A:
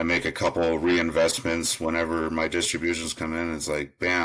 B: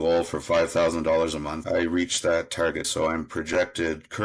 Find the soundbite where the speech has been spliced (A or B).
B